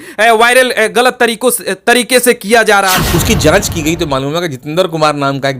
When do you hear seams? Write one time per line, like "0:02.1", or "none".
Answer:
0:03.0

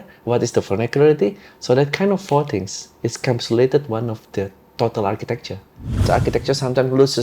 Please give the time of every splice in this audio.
0:06.1

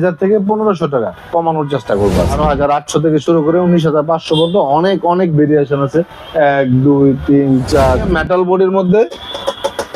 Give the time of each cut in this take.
0:02.4
0:08.0

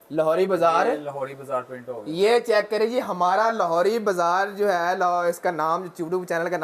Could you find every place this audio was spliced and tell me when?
none

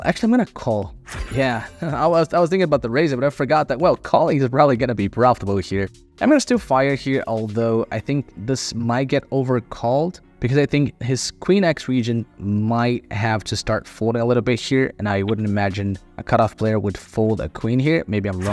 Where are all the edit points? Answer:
0:06.0

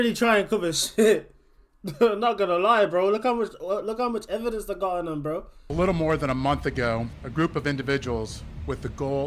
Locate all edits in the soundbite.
0:05.6

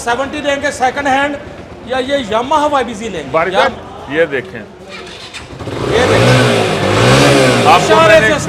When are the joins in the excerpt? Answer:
0:03.7

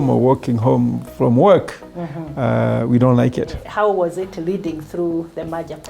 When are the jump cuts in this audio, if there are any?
0:03.6

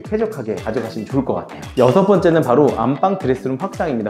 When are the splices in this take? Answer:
none

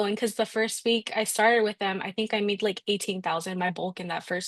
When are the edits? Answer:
none

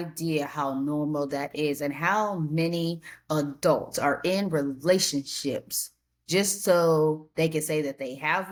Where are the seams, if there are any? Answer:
none

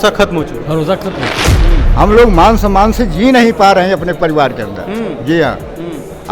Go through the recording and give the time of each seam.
0:01.5

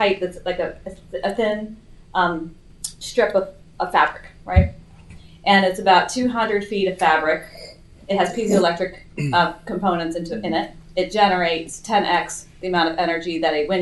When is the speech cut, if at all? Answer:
none

